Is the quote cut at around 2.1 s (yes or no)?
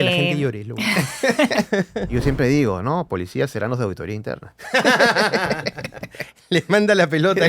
yes